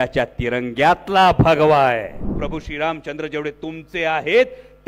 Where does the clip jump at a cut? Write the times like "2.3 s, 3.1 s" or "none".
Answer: 2.4 s